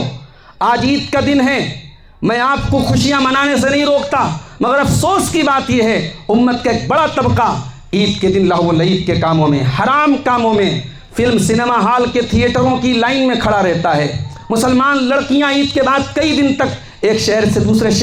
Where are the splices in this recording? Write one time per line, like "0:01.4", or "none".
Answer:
none